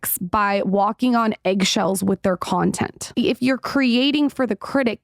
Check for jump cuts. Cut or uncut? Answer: cut